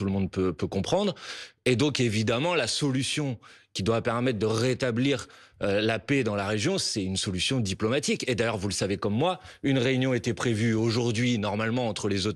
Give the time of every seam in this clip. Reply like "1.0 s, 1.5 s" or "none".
none